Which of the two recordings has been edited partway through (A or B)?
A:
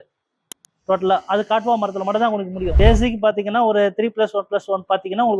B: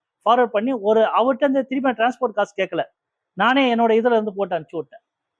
A